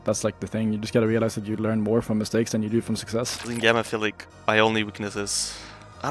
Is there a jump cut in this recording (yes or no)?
yes